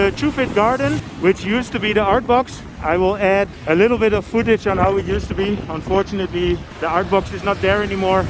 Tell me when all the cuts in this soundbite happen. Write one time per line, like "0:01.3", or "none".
0:01.1
0:03.6
0:06.7